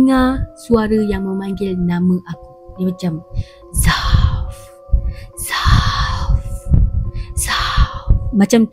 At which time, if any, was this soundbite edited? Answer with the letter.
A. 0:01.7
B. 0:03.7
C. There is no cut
C